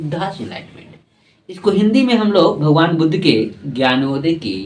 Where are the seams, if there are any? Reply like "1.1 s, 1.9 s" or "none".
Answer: none